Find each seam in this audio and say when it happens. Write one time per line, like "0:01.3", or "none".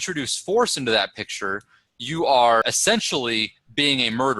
0:02.6

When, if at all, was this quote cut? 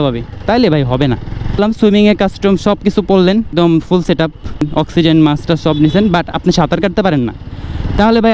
0:01.6
0:03.5
0:04.7

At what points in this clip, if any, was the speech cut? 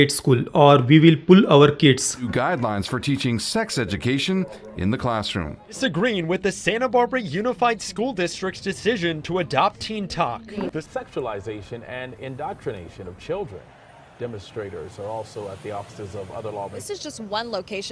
0:02.3
0:05.8
0:10.6
0:16.8

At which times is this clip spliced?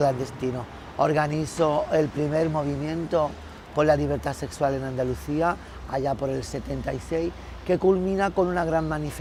none

